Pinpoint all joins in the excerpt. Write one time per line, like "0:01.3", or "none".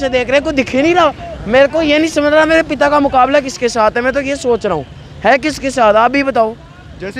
none

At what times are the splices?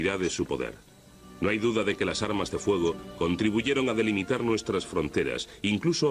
none

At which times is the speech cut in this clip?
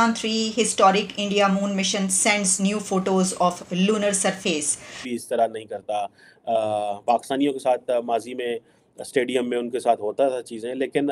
0:05.1

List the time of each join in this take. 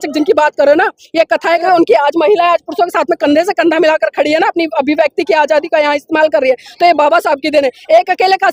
0:01.6

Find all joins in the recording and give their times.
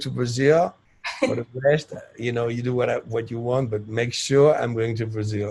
none

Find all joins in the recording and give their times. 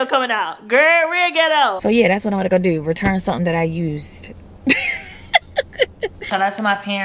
0:01.8
0:06.2

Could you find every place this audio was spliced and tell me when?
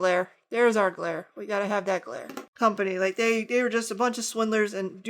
0:02.4

